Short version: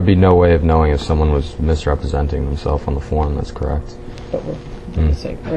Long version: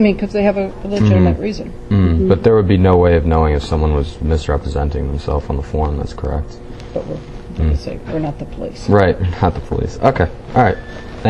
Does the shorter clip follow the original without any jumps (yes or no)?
yes